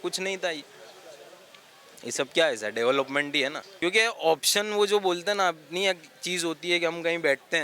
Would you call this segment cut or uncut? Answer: cut